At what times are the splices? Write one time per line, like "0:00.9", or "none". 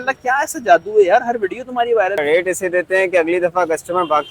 0:02.2